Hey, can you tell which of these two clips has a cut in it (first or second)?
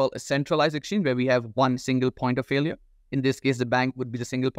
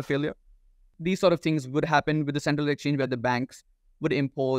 second